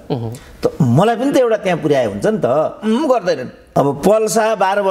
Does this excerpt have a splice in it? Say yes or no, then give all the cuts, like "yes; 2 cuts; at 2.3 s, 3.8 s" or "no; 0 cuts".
yes; 1 cut; at 3.5 s